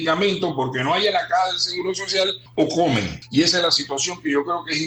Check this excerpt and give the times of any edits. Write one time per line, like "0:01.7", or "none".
0:02.4
0:03.2